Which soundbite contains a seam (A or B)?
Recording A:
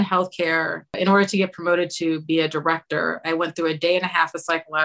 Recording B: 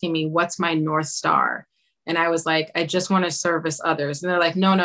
A